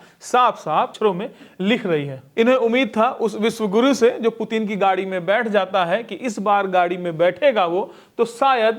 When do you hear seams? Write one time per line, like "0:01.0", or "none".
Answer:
0:00.9
0:02.2